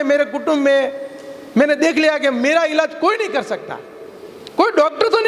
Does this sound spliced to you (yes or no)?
no